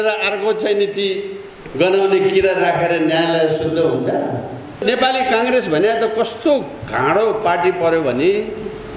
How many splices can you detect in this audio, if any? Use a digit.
1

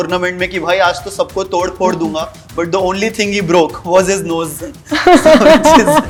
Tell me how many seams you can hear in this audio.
0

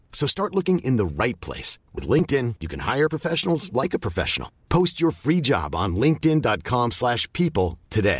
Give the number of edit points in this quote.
0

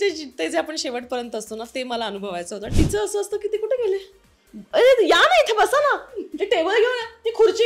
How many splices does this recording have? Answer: 1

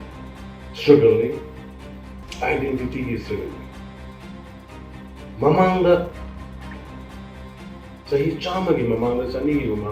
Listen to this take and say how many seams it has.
2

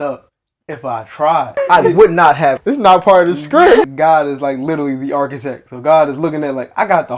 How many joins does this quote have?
3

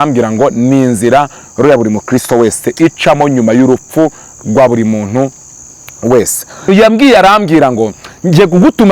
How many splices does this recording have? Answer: 1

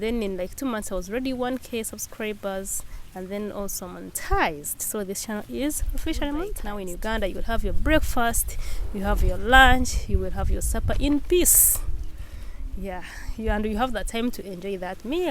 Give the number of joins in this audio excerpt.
1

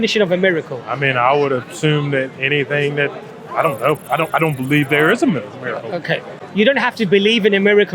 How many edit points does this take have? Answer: 1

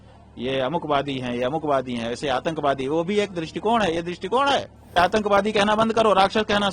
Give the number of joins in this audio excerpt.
1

